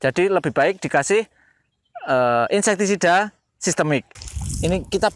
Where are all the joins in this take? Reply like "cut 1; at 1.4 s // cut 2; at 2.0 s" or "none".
cut 1; at 4.2 s